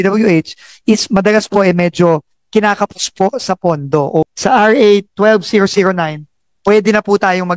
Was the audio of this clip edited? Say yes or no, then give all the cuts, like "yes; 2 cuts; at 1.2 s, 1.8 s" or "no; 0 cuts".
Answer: yes; 1 cut; at 4.3 s